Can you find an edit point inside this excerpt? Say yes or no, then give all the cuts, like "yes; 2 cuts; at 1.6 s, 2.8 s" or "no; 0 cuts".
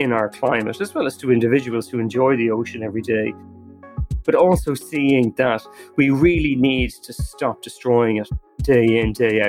yes; 1 cut; at 8.5 s